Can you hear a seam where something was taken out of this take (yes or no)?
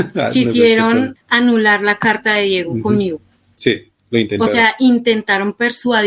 yes